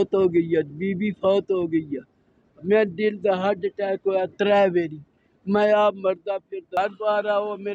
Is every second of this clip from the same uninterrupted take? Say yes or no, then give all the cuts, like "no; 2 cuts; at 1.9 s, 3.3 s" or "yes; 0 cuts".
no; 1 cut; at 6.8 s